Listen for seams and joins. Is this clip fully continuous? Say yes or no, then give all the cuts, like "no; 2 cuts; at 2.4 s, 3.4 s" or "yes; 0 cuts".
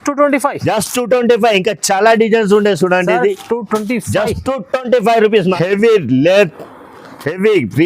no; 1 cut; at 5.5 s